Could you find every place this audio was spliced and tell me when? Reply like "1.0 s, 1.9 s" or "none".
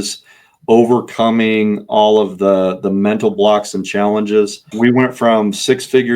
4.6 s